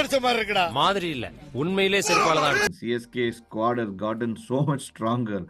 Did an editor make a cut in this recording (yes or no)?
yes